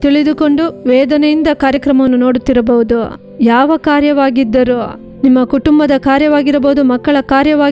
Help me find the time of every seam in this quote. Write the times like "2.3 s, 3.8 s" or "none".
3.3 s